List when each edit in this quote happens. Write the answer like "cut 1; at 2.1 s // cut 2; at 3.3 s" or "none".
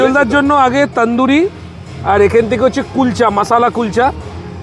none